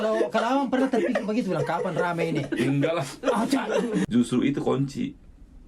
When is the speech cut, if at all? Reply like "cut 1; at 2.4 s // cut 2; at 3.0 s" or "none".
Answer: cut 1; at 4.1 s